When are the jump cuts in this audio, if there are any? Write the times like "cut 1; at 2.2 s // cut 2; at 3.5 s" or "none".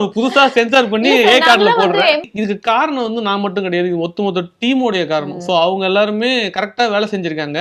cut 1; at 2.3 s